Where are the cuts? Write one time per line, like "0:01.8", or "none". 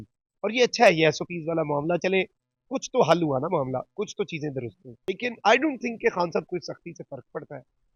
0:05.1